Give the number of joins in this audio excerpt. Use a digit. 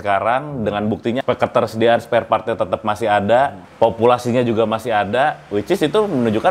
2